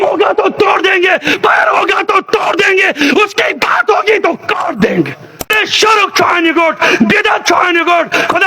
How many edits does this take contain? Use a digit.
1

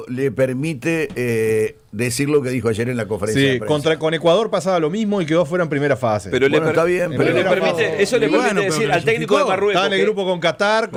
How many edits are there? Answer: 0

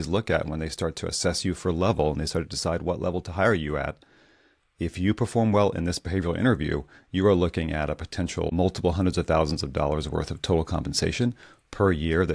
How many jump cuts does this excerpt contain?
1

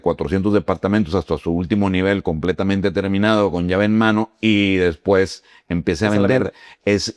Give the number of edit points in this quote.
0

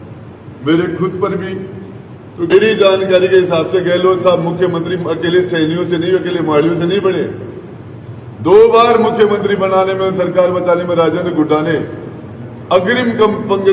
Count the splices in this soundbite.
1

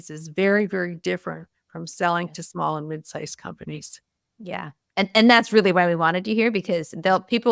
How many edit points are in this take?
0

